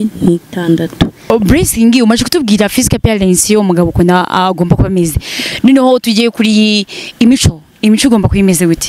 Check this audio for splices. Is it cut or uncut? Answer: cut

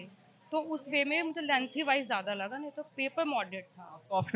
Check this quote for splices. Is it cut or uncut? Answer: uncut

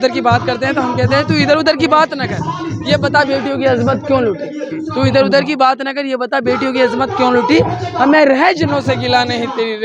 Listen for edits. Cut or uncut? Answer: uncut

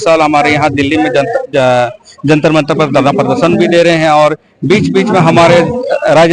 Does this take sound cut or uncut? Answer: uncut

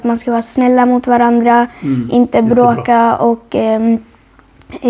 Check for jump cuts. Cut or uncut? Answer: uncut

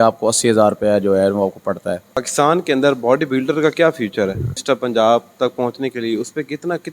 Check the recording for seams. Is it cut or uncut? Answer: cut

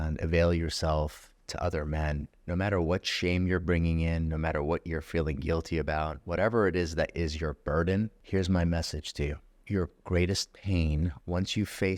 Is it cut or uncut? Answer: cut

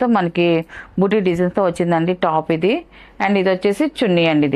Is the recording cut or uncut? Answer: uncut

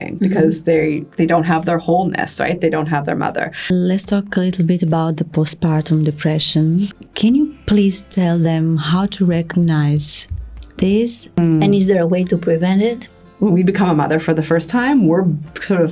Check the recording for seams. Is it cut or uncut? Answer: cut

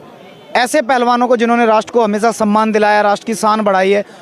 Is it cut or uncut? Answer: uncut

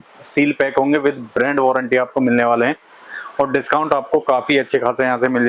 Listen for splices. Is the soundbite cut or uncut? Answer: uncut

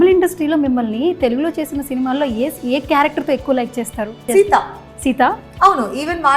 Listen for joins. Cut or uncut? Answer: cut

